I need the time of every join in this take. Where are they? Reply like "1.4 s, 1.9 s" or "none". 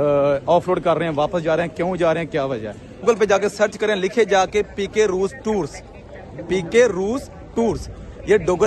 3.0 s